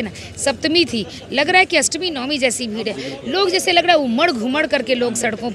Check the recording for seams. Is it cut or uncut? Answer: uncut